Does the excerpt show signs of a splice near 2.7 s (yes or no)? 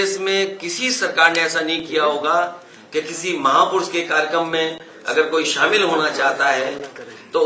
no